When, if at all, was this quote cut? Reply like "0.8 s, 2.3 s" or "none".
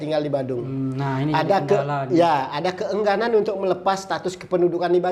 none